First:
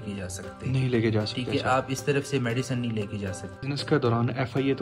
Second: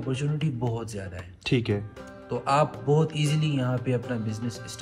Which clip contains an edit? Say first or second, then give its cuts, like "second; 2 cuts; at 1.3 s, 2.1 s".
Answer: first; 1 cut; at 3.6 s